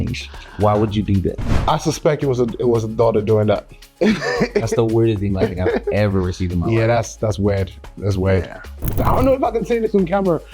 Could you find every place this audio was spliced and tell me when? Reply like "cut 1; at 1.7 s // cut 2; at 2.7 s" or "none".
cut 1; at 3.8 s // cut 2; at 9.0 s